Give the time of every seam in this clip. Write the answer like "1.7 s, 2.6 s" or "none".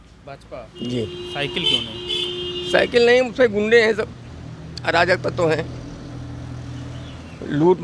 none